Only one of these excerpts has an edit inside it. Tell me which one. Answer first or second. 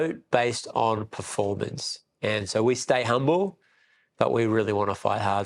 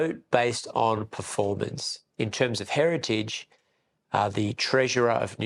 second